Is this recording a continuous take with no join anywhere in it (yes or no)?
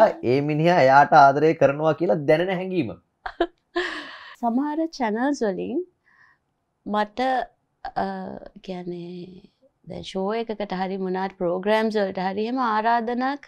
no